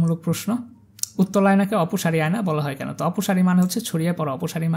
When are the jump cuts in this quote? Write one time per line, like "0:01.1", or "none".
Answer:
none